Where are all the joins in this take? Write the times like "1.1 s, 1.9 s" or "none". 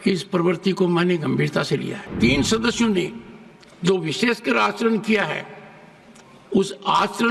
2.1 s